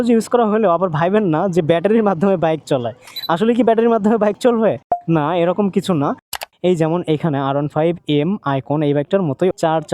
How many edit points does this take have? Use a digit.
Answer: 2